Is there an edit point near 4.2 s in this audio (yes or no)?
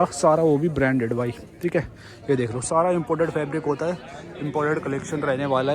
no